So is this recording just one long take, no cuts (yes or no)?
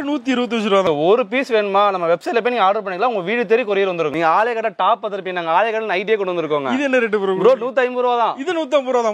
no